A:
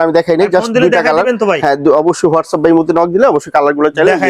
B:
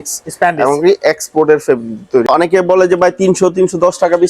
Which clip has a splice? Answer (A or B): B